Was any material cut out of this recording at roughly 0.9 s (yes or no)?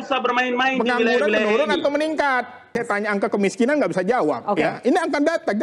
no